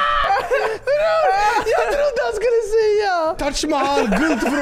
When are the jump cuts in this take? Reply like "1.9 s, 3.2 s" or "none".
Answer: 3.5 s